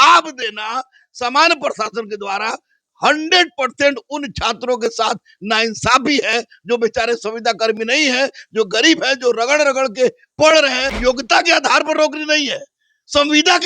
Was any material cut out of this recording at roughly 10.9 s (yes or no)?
yes